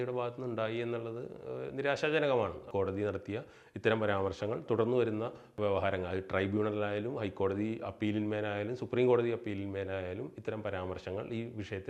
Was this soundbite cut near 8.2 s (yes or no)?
no